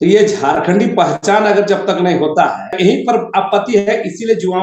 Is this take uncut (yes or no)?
no